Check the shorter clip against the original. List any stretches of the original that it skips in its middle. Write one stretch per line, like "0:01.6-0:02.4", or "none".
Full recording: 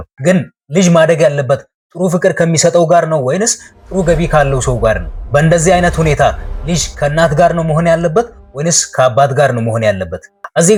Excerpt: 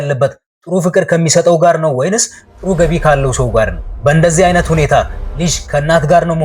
none